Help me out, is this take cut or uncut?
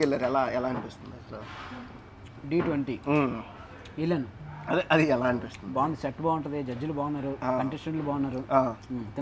uncut